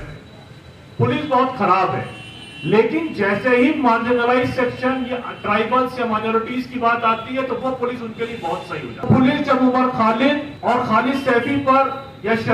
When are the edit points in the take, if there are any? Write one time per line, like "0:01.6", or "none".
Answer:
0:09.1
0:10.5